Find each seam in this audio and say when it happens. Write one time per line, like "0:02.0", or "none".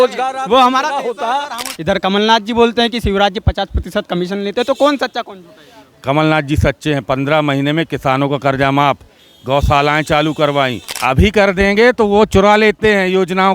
0:01.7
0:10.9